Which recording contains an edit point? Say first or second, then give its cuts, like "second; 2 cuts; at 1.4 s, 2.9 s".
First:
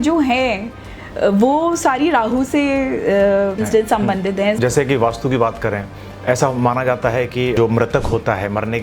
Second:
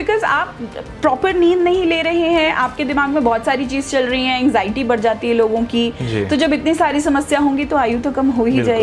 first; 2 cuts; at 4.6 s, 7.6 s